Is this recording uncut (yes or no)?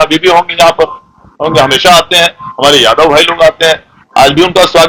yes